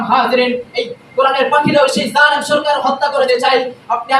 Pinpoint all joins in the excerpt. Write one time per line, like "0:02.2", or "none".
0:03.3